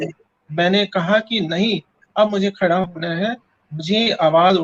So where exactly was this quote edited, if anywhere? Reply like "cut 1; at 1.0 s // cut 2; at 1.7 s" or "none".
none